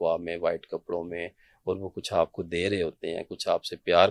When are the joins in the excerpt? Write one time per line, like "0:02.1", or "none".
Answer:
none